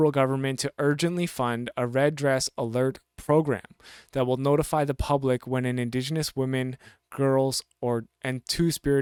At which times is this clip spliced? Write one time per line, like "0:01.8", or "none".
none